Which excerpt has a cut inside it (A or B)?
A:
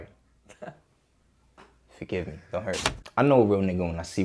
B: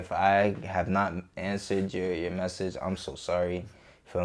A